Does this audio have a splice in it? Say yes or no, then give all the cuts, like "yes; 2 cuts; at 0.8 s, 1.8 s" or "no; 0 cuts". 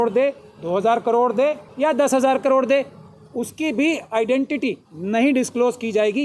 yes; 2 cuts; at 1.6 s, 4.9 s